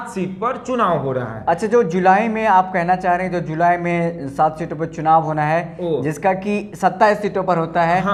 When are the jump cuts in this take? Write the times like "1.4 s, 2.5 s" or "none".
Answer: none